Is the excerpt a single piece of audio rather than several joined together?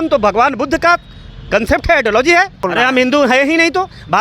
no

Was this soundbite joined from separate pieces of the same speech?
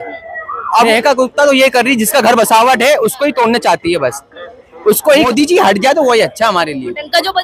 yes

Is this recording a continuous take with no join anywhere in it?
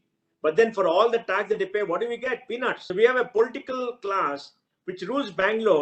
no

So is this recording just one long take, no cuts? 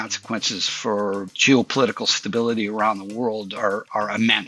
yes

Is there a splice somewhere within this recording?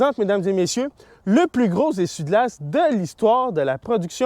no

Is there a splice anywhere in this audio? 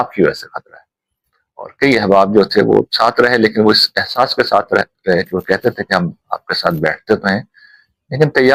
no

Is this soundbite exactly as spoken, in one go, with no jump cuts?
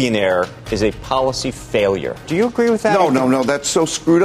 no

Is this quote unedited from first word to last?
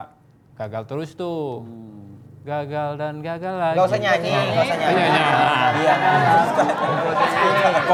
yes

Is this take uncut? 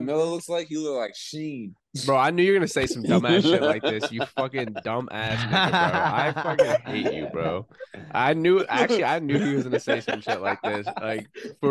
yes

